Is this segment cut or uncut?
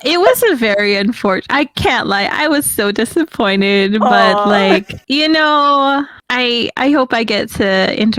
uncut